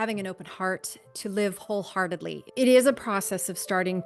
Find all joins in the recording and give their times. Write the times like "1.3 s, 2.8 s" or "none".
2.4 s

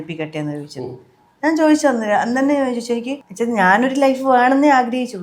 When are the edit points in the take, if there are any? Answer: 3.2 s

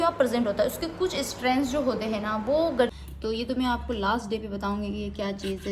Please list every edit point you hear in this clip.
3.0 s

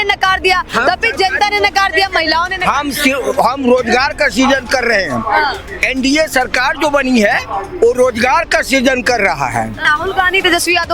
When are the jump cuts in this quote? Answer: 9.8 s

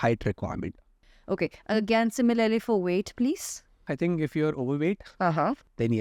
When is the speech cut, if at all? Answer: 0.9 s, 3.9 s

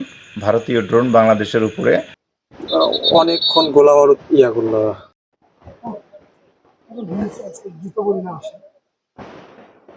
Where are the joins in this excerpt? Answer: 2.2 s

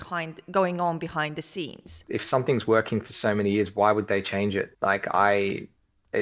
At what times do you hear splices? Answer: 2.0 s

